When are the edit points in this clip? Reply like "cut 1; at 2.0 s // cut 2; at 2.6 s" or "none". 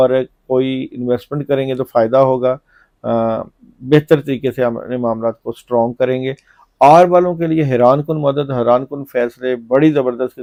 none